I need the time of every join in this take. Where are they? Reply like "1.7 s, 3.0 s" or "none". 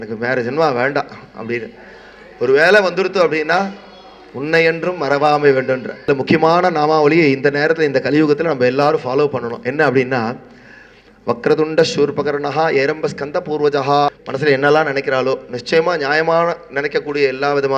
6.1 s, 14.2 s